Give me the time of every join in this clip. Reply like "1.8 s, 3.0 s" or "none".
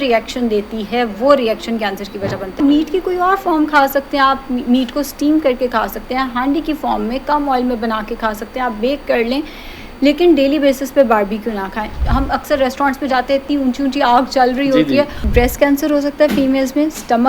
2.6 s, 12.0 s, 15.2 s